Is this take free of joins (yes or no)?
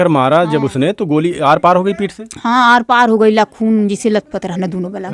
yes